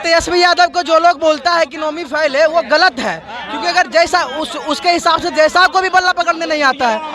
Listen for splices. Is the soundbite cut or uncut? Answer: uncut